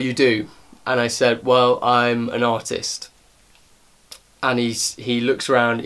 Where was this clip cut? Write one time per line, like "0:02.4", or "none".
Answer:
none